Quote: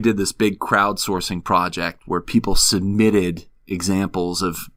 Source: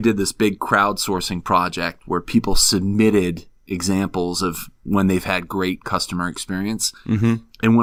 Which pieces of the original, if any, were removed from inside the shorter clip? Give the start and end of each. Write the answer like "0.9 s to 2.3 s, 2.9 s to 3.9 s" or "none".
none

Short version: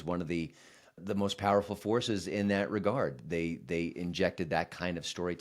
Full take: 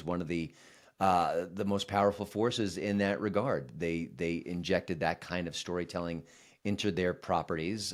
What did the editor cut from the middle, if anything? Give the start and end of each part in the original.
1.0 s to 1.5 s

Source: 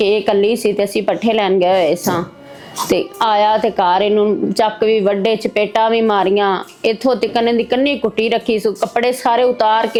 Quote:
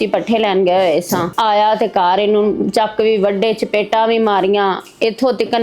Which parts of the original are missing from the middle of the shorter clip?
2.3 s to 3.1 s

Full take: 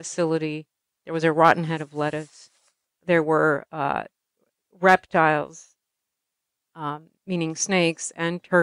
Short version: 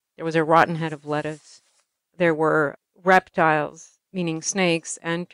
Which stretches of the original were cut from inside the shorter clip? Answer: 3.7 s to 4.6 s, 5.7 s to 7.1 s

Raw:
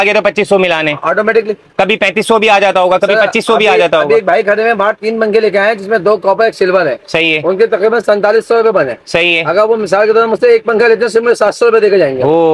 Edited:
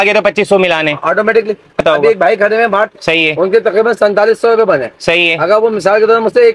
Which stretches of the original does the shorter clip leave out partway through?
1.8 s to 3.9 s, 5.0 s to 7.0 s

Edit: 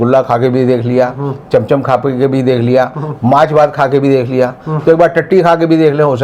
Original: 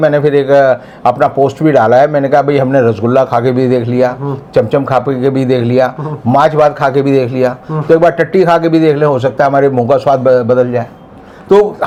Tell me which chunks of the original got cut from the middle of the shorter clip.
none

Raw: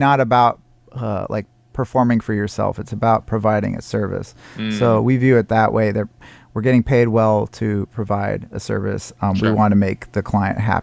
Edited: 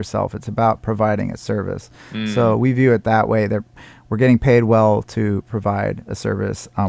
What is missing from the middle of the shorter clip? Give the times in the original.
none

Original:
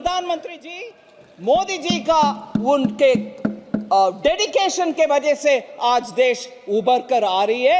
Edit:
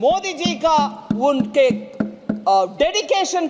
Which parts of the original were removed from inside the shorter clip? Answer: none

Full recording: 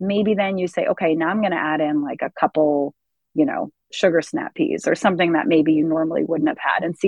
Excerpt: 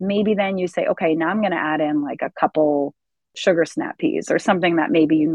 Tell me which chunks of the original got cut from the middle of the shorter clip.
3.2 s to 3.7 s

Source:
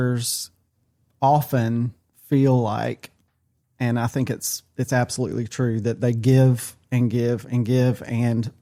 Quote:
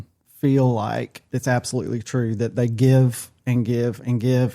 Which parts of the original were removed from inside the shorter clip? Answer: 3.1 s to 4.6 s

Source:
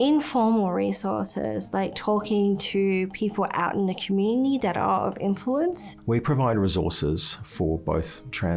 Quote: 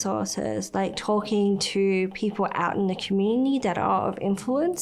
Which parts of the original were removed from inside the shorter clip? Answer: none

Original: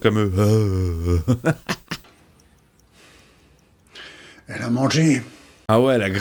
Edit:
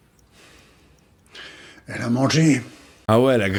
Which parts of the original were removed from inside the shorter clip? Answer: none

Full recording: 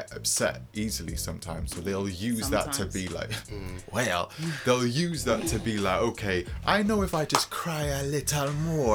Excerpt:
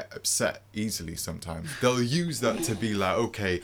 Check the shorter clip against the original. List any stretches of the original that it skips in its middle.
1.7 s to 4.5 s

